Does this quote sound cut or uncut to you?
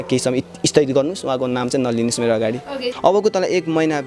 cut